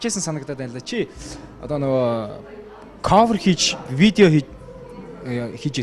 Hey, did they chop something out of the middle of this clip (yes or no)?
yes